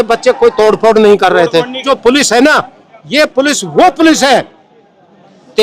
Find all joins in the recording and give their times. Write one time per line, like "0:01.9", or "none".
0:01.8